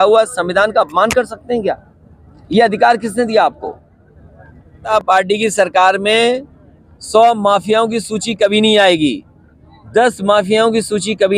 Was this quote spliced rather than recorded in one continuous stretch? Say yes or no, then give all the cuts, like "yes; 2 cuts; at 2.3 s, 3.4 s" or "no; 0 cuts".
yes; 1 cut; at 4.8 s